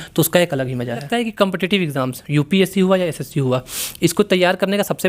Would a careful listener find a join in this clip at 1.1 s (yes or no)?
yes